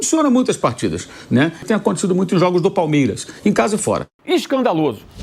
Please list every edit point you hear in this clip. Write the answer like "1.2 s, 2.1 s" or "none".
1.6 s, 4.1 s